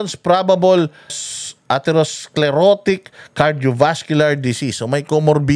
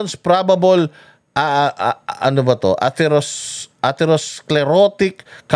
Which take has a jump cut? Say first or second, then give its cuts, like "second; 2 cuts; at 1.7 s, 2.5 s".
first; 1 cut; at 1.2 s